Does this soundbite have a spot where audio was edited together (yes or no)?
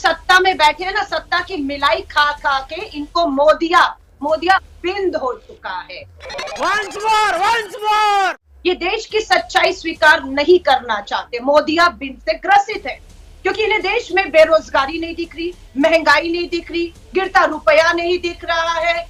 no